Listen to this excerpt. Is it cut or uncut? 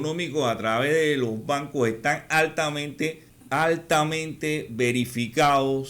cut